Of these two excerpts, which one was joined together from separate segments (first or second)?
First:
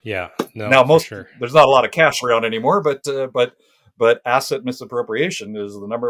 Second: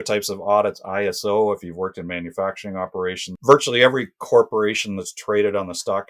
second